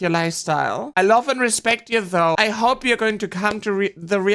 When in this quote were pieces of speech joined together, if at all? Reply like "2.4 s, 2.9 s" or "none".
2.3 s